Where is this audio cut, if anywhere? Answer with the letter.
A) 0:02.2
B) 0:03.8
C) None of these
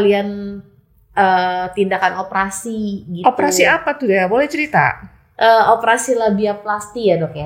C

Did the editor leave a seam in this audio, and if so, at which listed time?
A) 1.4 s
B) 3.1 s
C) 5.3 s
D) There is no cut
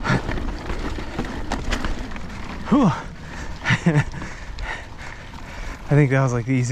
C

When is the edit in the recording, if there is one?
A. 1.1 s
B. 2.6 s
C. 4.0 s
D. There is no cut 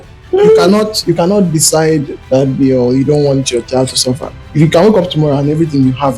D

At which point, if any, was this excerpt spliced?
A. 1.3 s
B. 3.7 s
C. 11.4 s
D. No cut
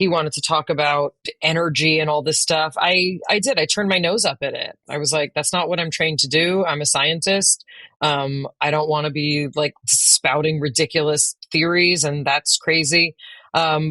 A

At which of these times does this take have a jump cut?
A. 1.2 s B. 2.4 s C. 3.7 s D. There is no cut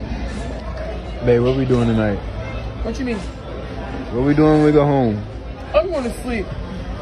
D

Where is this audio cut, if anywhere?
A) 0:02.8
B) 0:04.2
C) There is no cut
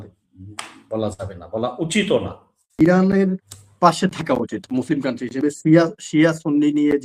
A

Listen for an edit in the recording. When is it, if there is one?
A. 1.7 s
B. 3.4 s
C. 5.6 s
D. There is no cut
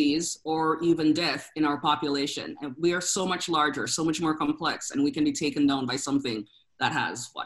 D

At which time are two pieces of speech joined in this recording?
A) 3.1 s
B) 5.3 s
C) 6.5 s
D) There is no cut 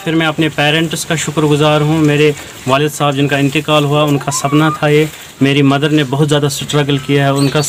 D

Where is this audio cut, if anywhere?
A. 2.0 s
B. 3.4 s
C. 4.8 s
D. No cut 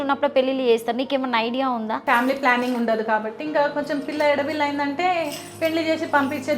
A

